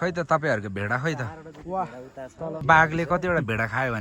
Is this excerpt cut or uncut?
cut